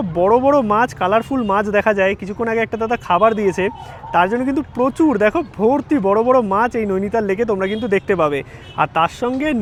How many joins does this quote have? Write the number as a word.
zero